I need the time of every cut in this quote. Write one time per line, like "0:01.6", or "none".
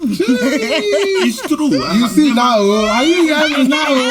none